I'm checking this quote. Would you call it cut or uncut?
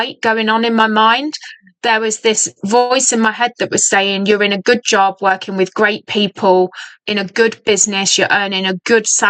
uncut